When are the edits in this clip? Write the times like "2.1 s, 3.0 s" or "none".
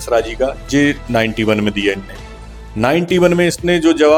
none